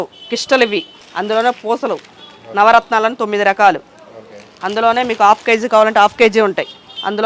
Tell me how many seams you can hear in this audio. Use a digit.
0